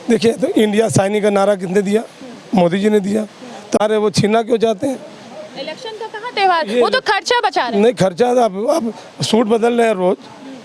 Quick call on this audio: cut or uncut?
cut